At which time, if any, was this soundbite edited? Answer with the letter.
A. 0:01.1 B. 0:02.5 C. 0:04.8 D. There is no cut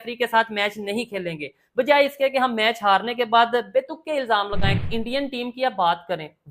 C